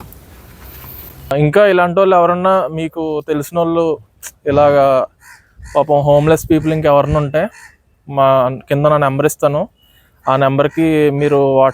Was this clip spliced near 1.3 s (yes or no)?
yes